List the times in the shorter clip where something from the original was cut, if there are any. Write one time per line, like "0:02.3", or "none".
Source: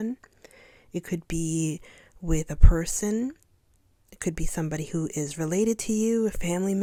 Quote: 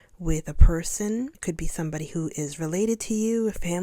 0:01.4